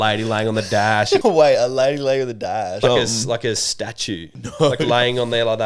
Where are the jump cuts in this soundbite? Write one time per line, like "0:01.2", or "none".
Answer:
0:01.2
0:02.8
0:04.3